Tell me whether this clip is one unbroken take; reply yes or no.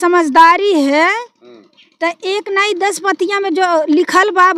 yes